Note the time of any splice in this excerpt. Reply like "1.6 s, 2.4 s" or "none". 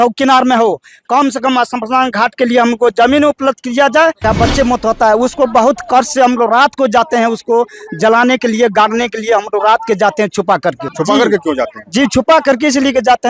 4.2 s, 10.9 s